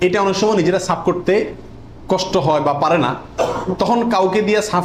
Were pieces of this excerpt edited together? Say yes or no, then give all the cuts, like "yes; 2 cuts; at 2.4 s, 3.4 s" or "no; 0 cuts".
no; 0 cuts